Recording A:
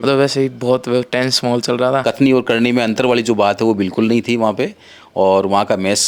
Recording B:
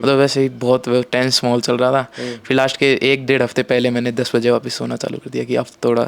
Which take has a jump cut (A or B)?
A